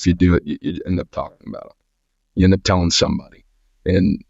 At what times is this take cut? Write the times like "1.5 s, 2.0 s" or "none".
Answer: none

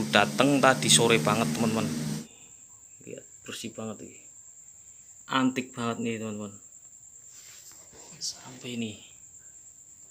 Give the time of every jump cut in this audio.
2.2 s

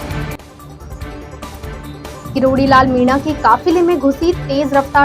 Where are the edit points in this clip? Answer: 1.6 s

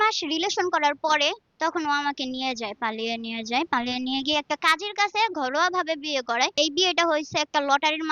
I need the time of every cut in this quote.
1.5 s, 6.6 s

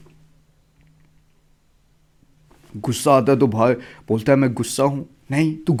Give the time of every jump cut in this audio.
none

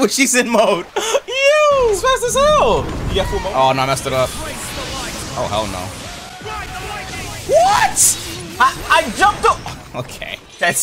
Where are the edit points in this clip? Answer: 2.0 s, 3.3 s

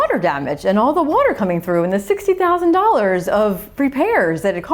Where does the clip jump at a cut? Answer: none

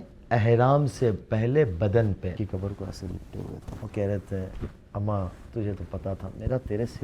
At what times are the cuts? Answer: 2.4 s, 3.7 s

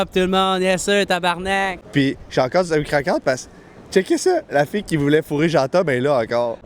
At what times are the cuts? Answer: 1.8 s

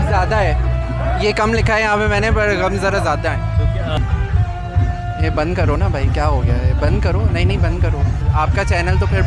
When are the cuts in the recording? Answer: 4.0 s, 8.2 s

